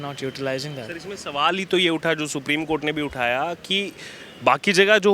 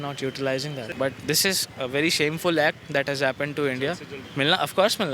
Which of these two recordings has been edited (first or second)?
second